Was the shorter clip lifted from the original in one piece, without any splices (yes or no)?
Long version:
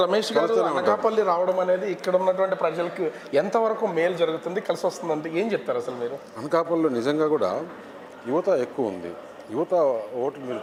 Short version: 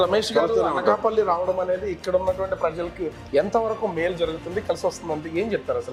yes